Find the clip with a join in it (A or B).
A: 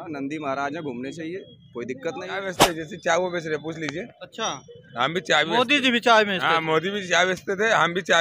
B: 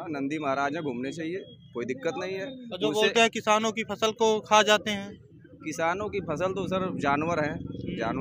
A